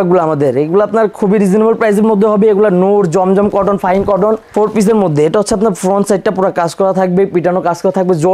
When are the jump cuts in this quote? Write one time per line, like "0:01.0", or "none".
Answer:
0:04.5